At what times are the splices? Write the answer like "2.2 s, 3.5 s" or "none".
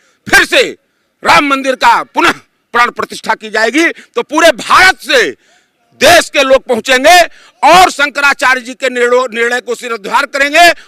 none